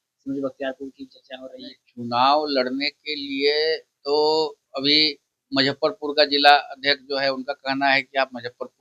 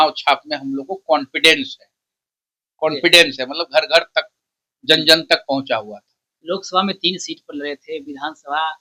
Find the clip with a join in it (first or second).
second